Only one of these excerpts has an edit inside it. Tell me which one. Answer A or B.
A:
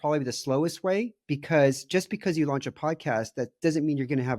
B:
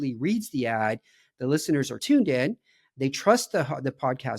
B